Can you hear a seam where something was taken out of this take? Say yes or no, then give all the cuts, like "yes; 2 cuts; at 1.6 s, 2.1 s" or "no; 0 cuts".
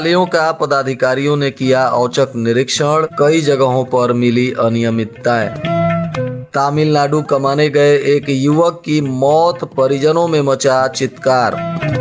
no; 0 cuts